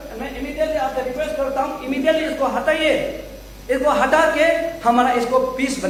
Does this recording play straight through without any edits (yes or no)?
yes